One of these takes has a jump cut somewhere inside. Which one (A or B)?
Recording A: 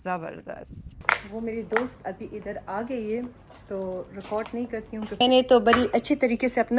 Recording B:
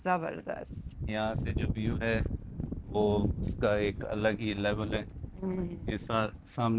A